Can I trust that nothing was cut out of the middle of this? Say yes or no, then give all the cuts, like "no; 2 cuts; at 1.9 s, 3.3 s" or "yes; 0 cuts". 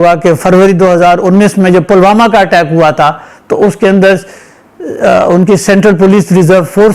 yes; 0 cuts